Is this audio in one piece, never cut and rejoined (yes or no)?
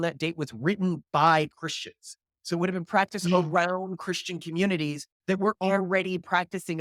yes